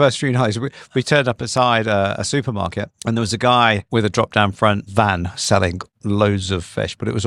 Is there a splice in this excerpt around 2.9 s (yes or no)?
yes